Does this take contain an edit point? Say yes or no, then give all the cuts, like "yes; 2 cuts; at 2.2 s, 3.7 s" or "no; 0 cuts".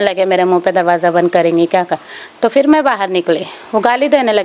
no; 0 cuts